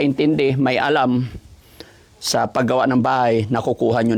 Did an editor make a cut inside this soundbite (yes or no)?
no